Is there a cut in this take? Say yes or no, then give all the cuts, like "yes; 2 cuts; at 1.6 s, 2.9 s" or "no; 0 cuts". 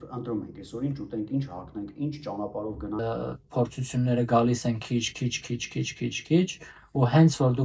yes; 1 cut; at 3.0 s